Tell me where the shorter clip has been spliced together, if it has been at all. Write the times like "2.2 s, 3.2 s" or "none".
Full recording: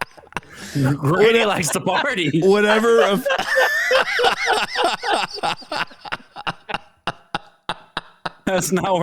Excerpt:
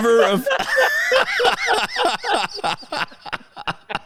none